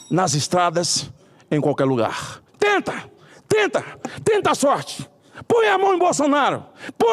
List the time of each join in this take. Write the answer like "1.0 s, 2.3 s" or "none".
2.4 s